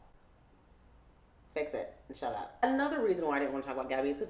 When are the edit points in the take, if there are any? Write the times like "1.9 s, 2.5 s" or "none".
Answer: 2.6 s